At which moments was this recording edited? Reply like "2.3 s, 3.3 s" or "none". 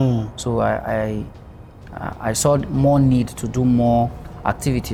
none